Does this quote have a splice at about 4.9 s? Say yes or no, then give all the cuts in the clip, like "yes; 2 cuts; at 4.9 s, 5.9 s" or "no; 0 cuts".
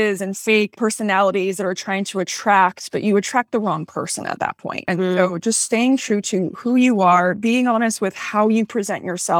yes; 1 cut; at 4.9 s